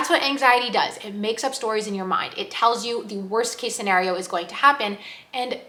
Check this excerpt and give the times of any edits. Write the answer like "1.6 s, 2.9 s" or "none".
none